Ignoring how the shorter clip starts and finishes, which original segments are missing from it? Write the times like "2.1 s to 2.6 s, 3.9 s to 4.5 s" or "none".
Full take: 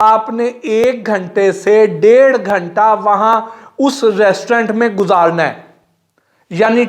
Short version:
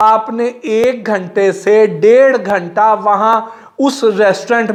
none